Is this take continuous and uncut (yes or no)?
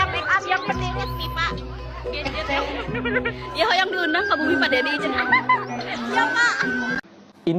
yes